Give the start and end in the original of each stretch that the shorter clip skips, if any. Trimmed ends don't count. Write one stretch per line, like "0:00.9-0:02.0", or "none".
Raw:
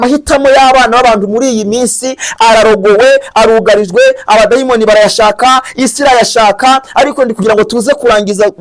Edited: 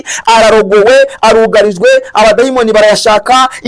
none

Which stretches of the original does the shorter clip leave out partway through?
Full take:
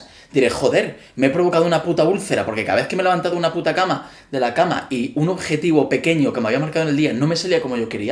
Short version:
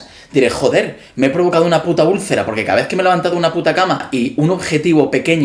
0:04.1-0:04.8

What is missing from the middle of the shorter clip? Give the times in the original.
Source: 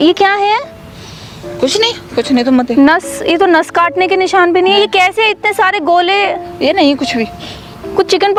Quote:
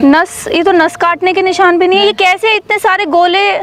none

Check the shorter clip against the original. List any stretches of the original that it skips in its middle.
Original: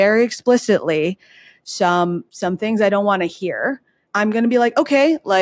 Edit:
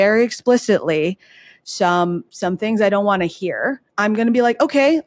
0:03.8-0:04.0

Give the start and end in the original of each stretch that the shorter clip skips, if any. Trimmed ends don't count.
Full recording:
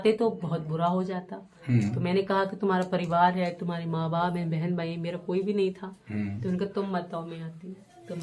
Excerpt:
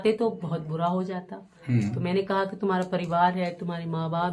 none

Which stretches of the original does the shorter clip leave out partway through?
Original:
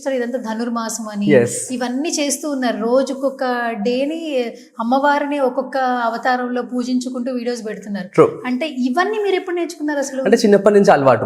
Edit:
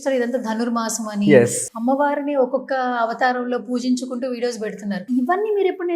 0:01.6-0:04.7
0:08.1-0:08.7

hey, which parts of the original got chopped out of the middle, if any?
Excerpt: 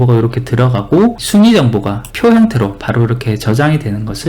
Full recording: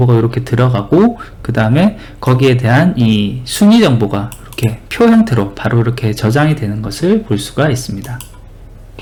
0:01.2-0:03.5
0:04.3-0:04.8

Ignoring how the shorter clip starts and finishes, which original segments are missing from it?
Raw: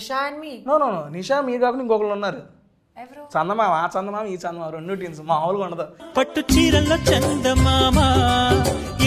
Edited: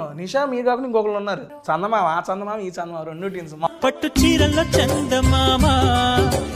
0:02.5-0:03.2
0:05.3-0:06.0

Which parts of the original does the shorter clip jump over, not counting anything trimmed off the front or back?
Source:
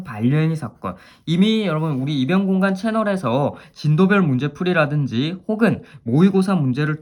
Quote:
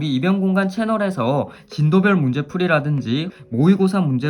0:05.4-0:05.9

